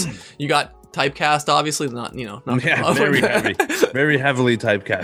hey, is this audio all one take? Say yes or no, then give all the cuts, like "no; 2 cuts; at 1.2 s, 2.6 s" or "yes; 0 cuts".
yes; 0 cuts